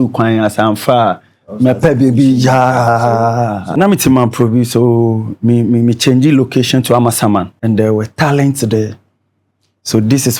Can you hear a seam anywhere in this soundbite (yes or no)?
yes